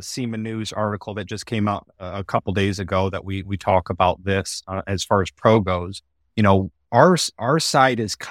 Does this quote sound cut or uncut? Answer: uncut